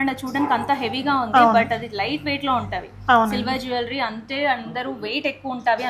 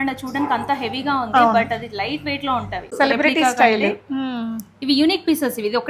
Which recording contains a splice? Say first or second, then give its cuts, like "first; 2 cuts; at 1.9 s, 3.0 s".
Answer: second; 1 cut; at 2.9 s